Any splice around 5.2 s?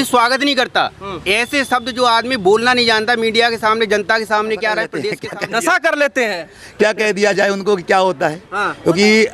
yes; 1 cut; at 5.2 s

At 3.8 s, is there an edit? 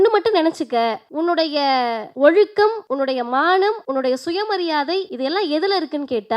yes; 5 cuts; at 1.0 s, 2.1 s, 2.8 s, 3.8 s, 5.1 s

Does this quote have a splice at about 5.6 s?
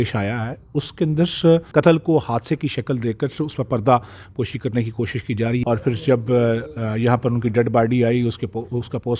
yes; 2 cuts; at 1.7 s, 5.6 s

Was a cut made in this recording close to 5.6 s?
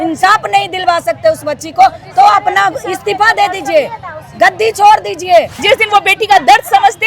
yes; 1 cut; at 5.6 s

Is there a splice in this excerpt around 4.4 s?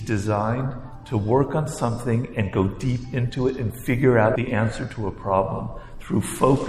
yes; 1 cut; at 4.4 s

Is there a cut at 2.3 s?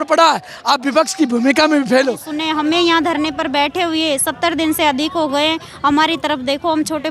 yes; 1 cut; at 2.3 s

